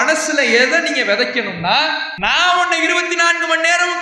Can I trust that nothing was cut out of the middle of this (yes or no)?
no